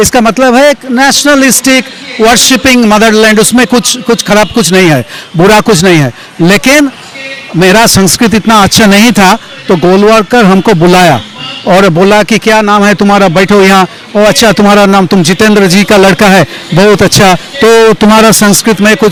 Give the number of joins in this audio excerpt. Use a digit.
0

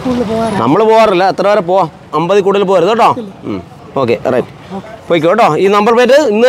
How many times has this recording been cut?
2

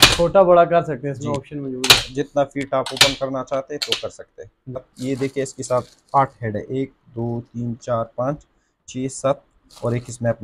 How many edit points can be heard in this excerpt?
1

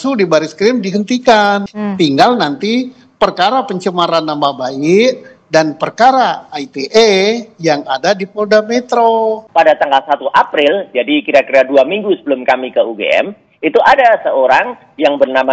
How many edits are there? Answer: 2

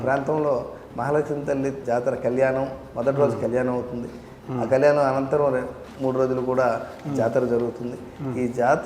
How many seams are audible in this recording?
2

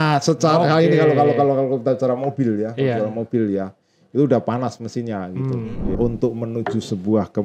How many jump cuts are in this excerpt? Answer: 1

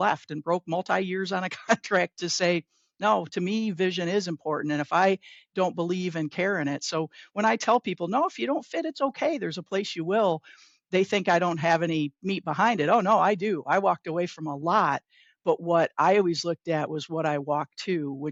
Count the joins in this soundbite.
0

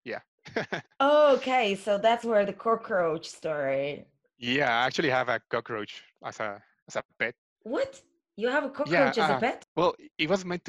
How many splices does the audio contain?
2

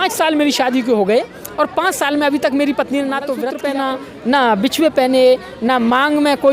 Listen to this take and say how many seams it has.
1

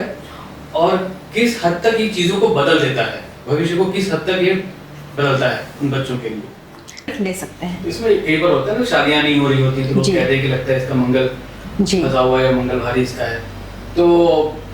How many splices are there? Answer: 1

